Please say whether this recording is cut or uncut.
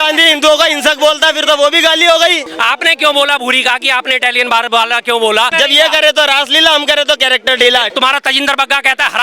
cut